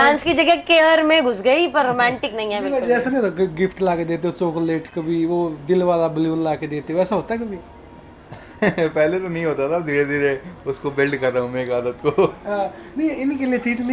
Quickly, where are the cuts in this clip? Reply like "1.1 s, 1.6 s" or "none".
none